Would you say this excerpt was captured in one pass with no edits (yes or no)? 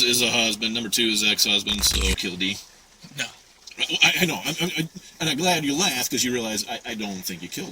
no